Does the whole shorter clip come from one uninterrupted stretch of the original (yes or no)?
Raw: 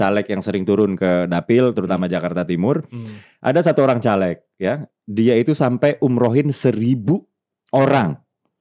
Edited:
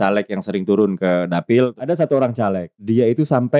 no